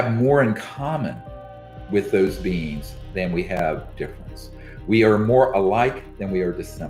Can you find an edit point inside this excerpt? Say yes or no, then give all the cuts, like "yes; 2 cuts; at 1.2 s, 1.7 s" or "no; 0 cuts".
no; 0 cuts